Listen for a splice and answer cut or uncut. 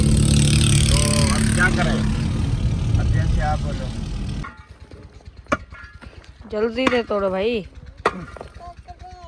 cut